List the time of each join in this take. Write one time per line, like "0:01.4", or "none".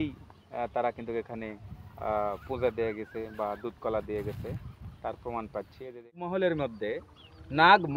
0:06.1